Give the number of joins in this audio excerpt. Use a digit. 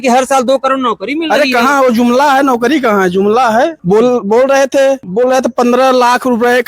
2